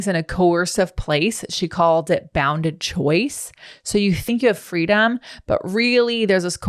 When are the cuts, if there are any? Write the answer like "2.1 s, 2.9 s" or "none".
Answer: 4.2 s